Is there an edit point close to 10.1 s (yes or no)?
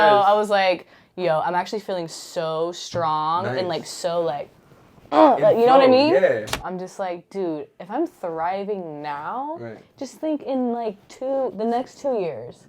no